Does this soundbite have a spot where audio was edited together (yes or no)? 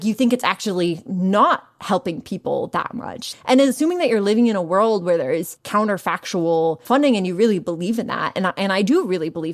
yes